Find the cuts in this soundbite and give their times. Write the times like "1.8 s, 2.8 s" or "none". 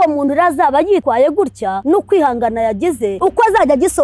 none